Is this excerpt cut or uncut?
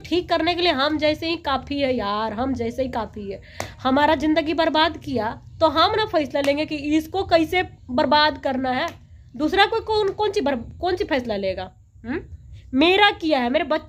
uncut